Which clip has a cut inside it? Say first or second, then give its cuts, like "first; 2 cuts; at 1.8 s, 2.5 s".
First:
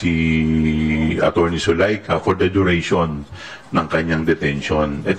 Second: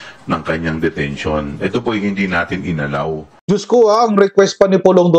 second; 1 cut; at 3.3 s